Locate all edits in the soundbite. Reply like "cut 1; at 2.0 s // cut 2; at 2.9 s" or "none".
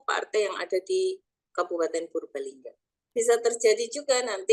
cut 1; at 3.1 s